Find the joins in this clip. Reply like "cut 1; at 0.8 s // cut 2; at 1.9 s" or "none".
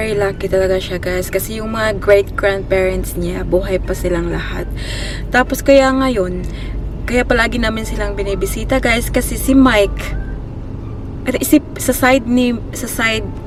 none